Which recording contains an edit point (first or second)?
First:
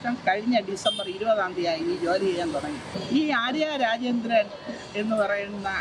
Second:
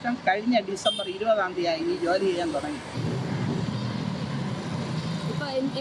first